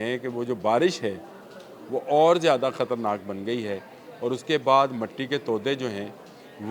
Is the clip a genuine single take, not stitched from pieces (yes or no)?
yes